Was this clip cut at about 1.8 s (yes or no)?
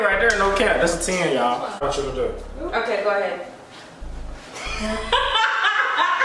yes